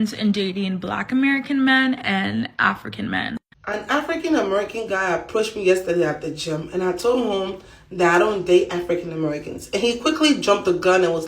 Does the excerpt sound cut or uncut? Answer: cut